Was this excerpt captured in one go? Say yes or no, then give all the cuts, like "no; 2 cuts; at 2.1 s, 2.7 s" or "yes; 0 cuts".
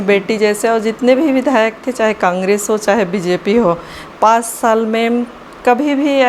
yes; 0 cuts